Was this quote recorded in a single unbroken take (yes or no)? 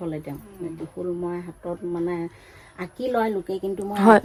yes